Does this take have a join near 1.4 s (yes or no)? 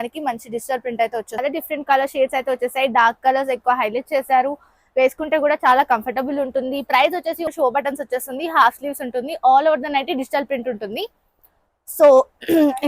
yes